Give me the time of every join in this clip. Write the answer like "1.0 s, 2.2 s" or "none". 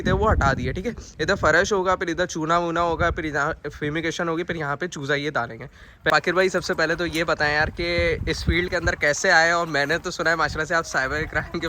6.1 s